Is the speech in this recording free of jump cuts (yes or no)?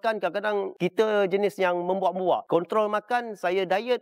yes